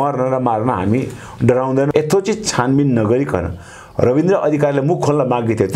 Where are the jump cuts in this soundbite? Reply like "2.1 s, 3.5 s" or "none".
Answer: 1.9 s